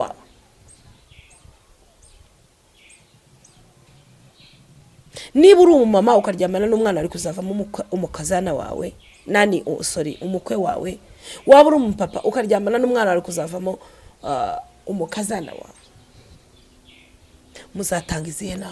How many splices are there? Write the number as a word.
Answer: zero